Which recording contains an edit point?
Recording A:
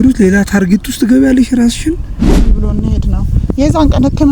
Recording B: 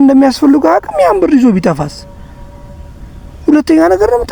A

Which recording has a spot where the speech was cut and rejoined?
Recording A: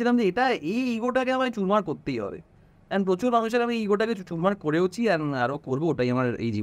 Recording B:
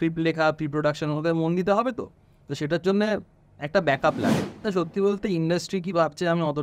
B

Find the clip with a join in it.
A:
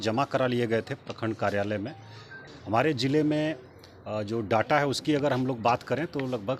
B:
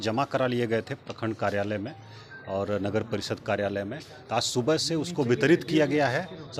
A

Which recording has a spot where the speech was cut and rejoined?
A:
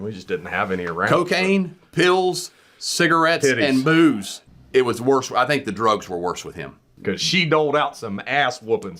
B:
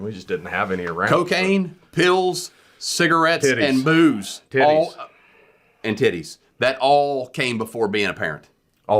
A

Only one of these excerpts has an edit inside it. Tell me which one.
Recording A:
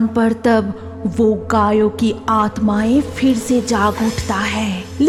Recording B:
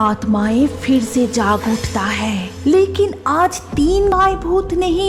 B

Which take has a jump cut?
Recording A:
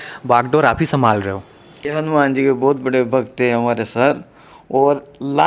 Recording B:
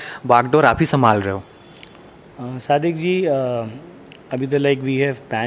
A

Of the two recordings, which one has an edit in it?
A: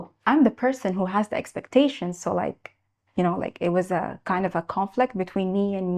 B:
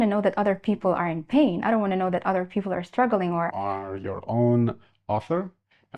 B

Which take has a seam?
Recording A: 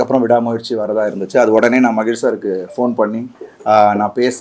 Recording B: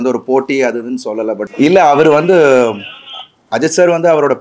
B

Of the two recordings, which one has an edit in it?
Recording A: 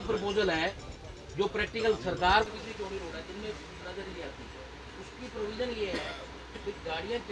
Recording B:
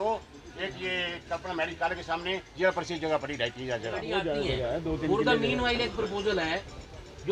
B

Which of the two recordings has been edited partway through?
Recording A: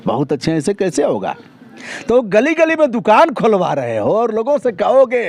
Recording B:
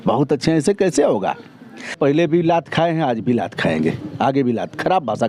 B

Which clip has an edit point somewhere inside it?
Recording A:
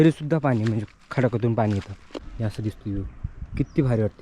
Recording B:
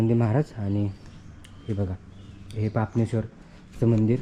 A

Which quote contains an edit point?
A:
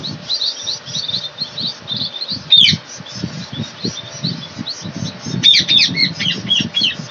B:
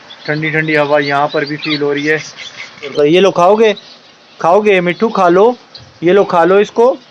B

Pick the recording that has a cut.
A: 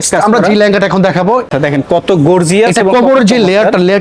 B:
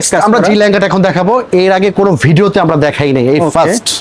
A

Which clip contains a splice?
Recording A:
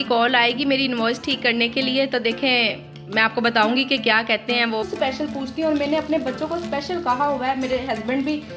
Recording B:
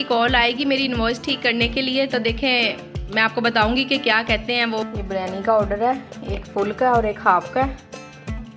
A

